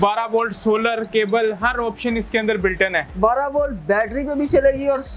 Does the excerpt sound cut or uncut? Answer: cut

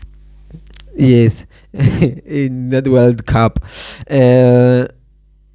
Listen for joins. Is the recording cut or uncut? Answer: uncut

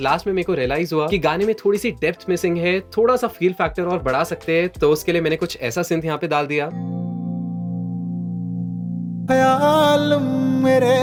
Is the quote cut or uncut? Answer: uncut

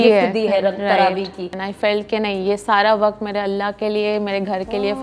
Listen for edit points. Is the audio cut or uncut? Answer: cut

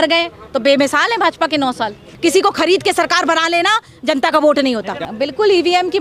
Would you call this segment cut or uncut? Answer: cut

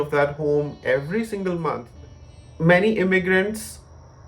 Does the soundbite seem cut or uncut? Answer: cut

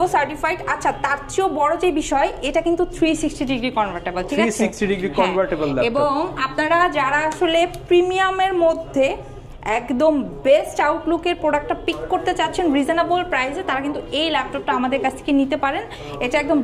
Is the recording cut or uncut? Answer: uncut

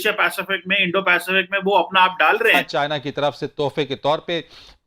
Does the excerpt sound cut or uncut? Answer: cut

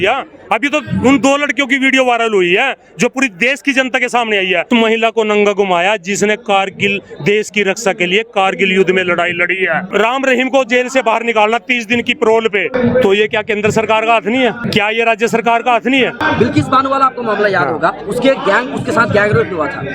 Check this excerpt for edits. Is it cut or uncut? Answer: cut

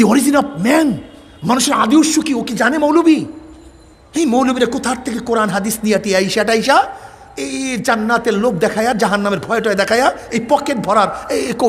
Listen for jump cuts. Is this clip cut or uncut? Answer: uncut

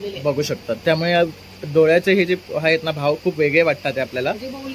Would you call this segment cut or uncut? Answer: uncut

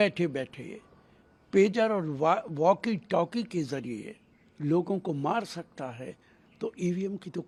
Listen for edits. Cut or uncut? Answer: uncut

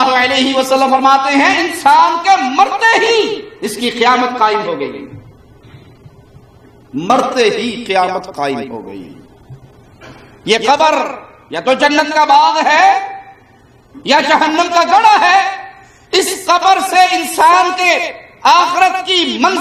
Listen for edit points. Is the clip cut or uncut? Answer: uncut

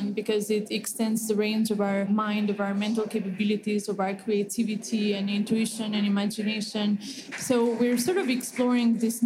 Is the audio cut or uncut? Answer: cut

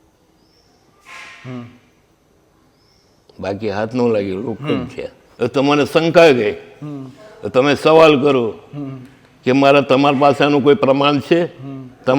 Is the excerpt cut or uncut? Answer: cut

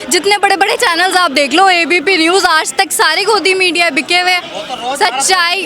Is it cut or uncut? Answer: uncut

